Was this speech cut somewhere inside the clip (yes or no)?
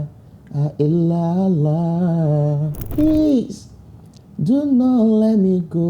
yes